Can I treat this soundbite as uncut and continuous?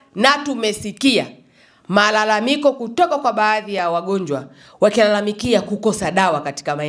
yes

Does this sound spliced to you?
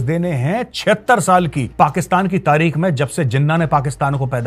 yes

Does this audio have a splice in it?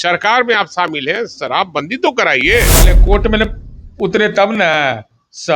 yes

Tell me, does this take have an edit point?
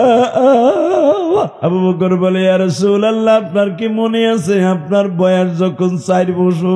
yes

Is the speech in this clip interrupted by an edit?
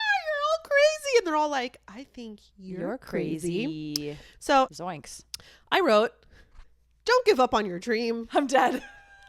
yes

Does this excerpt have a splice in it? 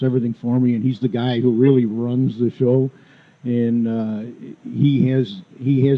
no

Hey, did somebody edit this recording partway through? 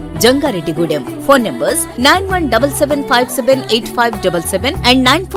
no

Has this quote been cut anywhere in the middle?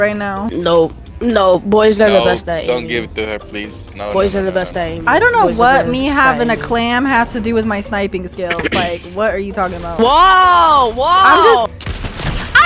yes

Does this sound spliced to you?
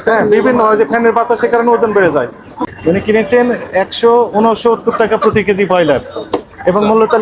yes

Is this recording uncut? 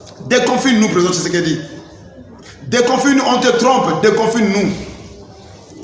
yes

